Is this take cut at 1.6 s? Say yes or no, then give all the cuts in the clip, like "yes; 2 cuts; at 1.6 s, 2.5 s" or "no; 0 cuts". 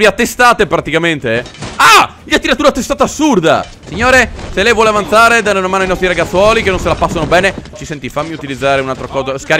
no; 2 cuts; at 3.9 s, 7.8 s